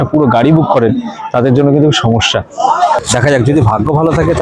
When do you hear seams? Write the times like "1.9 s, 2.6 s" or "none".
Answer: 3.0 s